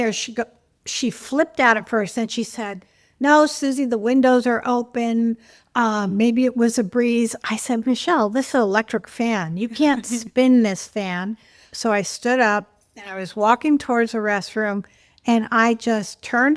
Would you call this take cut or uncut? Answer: cut